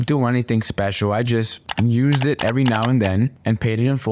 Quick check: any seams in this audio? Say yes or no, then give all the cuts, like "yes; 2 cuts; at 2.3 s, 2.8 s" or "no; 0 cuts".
no; 0 cuts